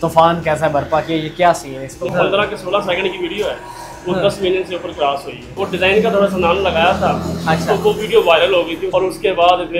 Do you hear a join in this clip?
yes; 3 cuts; at 2.1 s, 5.6 s, 8.8 s

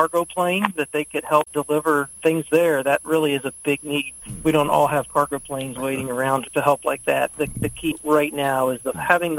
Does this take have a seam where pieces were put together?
yes; 3 cuts; at 4.1 s, 6.5 s, 7.5 s

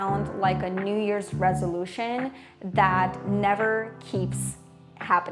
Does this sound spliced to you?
no; 0 cuts

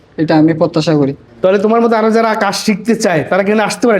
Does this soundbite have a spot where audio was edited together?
yes; 1 cut; at 1.2 s

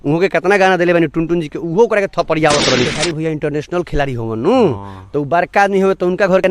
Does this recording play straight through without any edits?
no; 1 cut; at 2.9 s

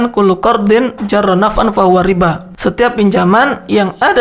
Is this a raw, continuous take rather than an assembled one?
no; 1 cut; at 2.5 s

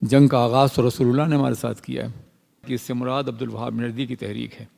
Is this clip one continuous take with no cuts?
no; 1 cut; at 2.7 s

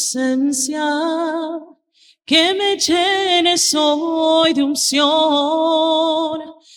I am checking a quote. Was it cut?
no; 0 cuts

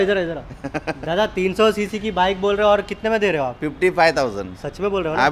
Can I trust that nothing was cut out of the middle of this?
yes; 0 cuts

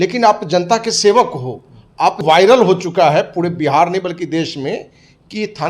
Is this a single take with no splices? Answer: no; 1 cut; at 2.2 s

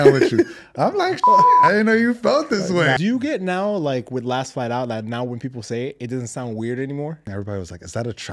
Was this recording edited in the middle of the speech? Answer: yes; 2 cuts; at 3.0 s, 7.3 s

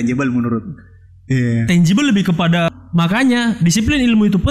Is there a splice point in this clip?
yes; 1 cut; at 2.7 s

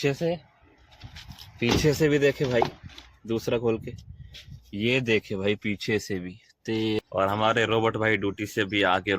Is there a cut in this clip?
yes; 1 cut; at 7.0 s

